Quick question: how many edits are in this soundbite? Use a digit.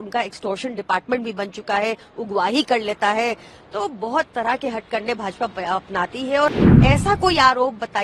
1